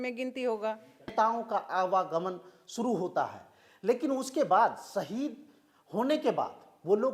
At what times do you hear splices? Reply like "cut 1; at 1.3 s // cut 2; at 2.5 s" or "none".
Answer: cut 1; at 1.1 s